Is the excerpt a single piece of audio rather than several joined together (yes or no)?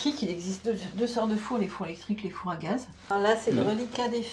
no